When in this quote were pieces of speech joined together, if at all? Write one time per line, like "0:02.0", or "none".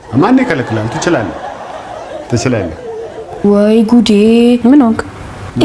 0:03.4